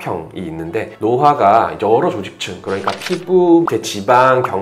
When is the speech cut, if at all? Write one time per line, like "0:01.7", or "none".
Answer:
none